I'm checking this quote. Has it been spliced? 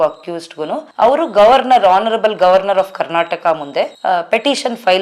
yes; 1 cut; at 3.9 s

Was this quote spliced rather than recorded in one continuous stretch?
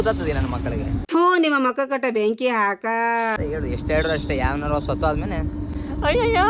no; 0 cuts

